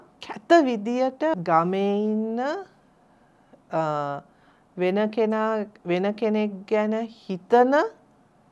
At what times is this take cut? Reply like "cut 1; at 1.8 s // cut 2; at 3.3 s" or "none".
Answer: cut 1; at 1.4 s